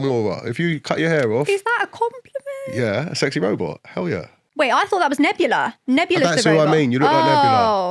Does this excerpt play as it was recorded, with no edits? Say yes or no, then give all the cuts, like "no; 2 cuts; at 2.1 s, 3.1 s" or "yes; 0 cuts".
no; 1 cut; at 4.4 s